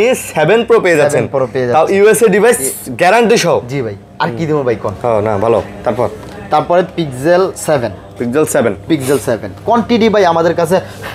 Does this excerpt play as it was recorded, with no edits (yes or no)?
yes